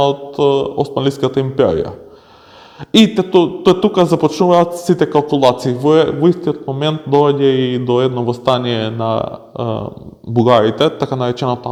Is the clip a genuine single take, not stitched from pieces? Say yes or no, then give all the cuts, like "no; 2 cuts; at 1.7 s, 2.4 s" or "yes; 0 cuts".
yes; 0 cuts